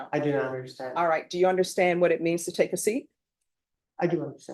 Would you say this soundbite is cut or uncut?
uncut